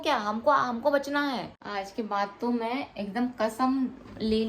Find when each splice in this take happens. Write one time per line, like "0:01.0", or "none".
0:01.6